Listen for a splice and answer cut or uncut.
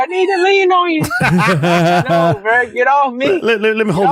uncut